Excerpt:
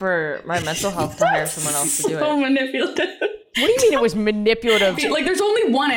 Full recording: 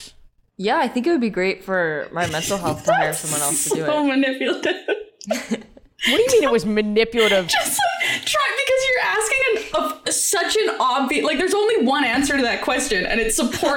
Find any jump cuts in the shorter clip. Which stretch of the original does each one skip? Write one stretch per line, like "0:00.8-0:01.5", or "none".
0:05.1-0:05.9
0:07.5-0:11.1